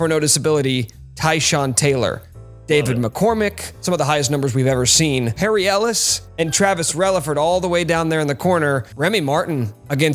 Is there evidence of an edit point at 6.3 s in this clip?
no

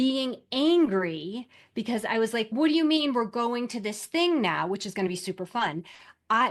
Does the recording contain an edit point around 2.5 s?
yes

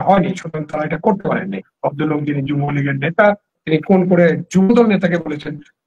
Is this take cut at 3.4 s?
no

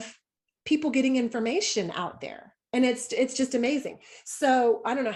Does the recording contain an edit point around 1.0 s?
no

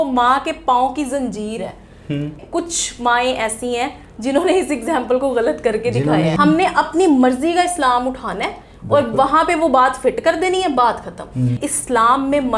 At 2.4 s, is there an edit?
yes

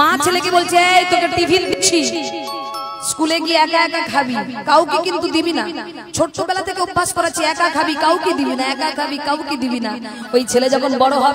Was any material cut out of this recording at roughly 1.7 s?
yes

